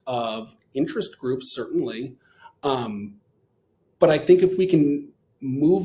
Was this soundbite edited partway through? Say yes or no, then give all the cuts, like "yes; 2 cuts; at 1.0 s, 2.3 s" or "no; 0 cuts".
no; 0 cuts